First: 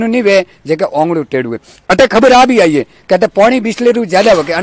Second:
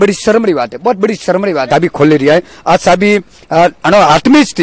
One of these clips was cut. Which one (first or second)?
second